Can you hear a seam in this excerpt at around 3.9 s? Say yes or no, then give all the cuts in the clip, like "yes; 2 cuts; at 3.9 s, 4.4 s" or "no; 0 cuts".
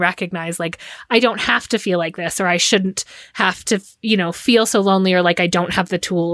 no; 0 cuts